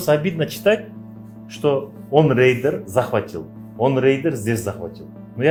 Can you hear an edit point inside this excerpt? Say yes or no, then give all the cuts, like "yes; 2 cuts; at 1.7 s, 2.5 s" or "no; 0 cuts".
no; 0 cuts